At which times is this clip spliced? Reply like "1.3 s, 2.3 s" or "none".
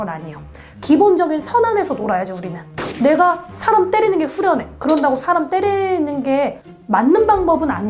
none